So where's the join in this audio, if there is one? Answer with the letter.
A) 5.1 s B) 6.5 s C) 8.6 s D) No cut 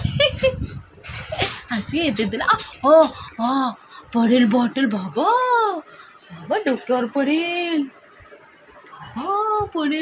D